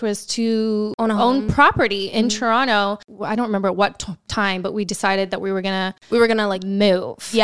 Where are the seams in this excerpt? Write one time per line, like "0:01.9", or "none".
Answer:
0:03.1